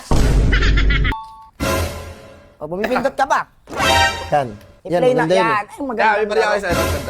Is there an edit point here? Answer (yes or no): yes